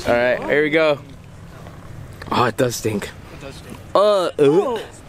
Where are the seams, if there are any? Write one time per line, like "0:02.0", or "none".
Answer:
none